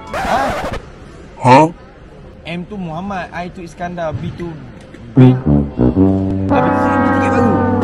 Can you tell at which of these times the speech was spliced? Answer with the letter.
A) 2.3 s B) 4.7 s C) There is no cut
A